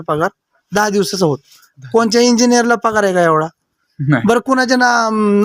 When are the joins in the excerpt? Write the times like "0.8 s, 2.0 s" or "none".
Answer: none